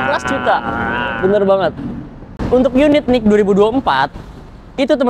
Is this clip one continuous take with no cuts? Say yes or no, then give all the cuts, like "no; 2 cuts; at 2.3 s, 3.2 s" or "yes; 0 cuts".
no; 1 cut; at 2.3 s